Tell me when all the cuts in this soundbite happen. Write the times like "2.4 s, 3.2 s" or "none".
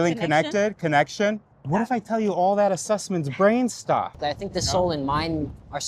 1.5 s, 4.2 s